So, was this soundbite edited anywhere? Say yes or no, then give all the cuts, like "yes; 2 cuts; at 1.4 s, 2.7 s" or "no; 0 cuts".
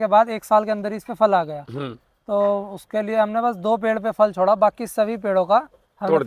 no; 0 cuts